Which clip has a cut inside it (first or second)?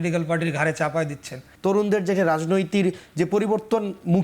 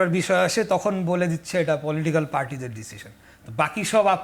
first